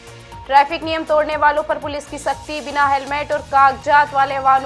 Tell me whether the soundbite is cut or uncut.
uncut